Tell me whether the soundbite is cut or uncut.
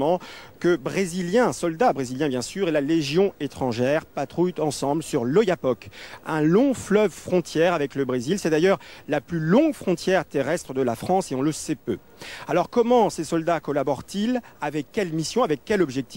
uncut